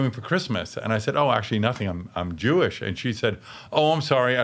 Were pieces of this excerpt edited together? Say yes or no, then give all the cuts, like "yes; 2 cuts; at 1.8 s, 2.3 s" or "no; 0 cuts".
no; 0 cuts